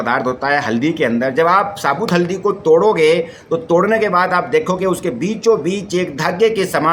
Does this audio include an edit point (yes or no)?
no